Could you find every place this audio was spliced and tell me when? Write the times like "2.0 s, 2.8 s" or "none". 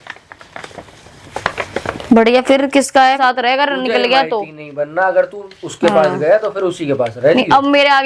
3.2 s